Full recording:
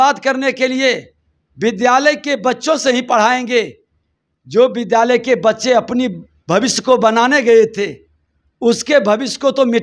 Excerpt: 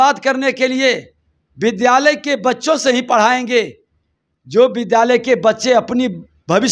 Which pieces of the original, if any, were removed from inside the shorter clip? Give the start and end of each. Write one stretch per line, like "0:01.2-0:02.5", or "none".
none

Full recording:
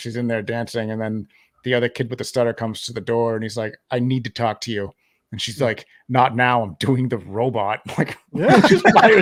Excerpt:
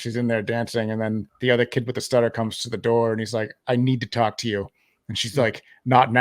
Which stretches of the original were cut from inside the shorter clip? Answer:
0:01.3-0:01.5

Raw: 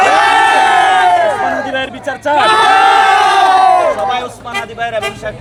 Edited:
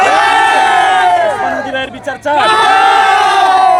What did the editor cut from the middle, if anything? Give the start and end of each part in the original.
none

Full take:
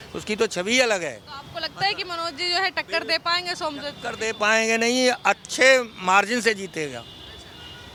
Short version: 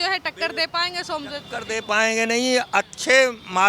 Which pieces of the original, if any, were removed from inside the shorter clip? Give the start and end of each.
none

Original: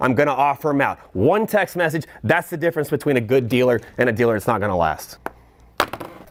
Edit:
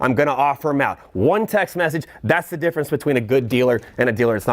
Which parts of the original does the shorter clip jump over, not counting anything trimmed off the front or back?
none

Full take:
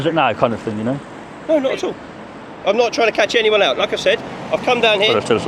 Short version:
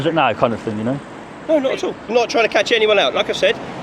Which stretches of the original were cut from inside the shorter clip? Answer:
0:02.1-0:02.7

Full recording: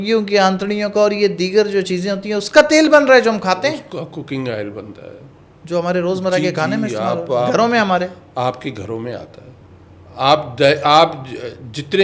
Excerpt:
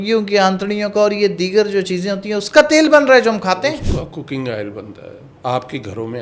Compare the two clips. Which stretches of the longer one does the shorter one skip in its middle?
0:05.3-0:08.2

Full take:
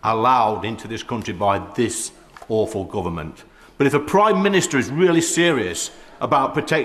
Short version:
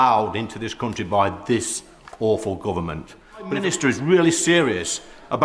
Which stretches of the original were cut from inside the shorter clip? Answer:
0:03.8-0:04.5

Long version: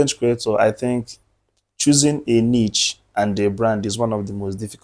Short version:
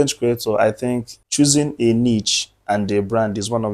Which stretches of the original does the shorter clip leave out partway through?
0:01.2-0:01.6

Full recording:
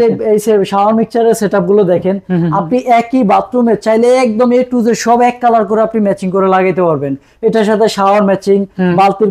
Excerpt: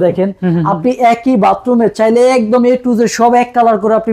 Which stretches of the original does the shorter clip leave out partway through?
none

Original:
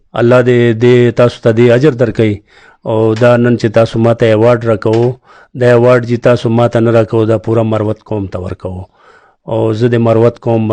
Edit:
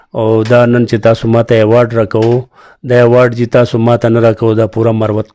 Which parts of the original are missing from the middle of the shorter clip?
none

